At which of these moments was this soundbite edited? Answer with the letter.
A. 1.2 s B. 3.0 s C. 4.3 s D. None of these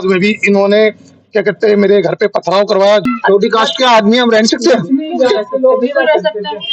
B